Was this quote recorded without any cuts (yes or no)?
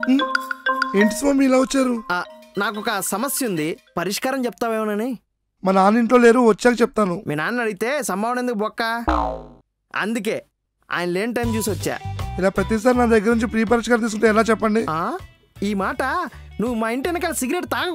yes